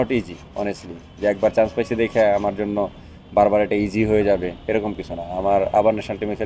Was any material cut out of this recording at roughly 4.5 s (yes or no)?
no